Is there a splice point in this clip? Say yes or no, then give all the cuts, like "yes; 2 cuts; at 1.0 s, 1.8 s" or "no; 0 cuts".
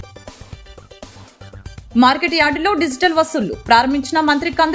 no; 0 cuts